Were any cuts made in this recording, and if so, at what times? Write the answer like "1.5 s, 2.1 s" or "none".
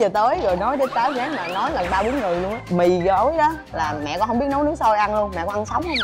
2.6 s